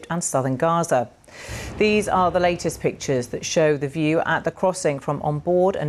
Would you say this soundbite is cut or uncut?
uncut